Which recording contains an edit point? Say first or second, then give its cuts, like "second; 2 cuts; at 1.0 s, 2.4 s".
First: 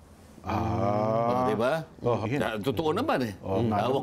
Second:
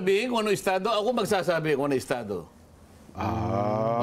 first; 1 cut; at 2.2 s